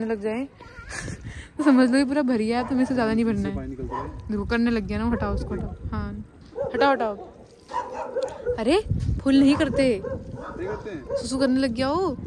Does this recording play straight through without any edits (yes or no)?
yes